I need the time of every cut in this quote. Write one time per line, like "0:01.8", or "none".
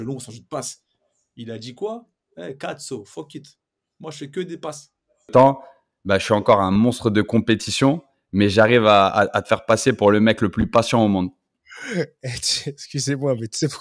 0:05.3

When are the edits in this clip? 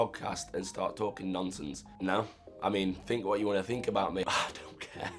0:01.8
0:04.2

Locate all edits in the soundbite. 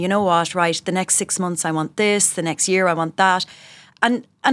none

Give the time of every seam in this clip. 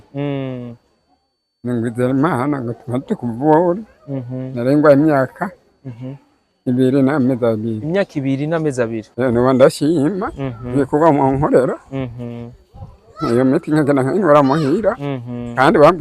0:09.0

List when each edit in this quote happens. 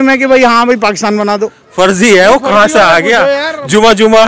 0:01.6

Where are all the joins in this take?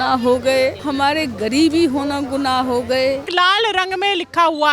0:03.3

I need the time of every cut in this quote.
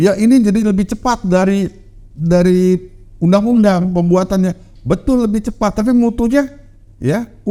none

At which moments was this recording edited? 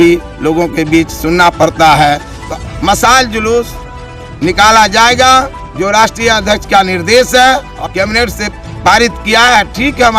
0:02.5
0:07.7

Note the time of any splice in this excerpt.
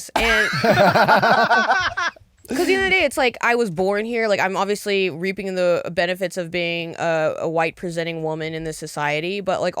none

